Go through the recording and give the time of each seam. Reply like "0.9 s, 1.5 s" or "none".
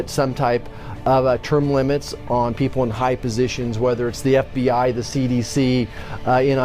2.6 s